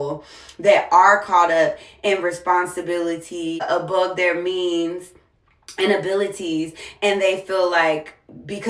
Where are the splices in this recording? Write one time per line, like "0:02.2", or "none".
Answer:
0:03.6